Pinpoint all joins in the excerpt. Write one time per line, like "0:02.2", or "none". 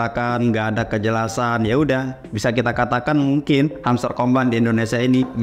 none